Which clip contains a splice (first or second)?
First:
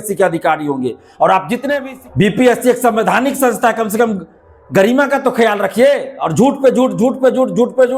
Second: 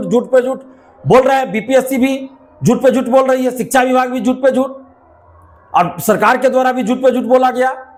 first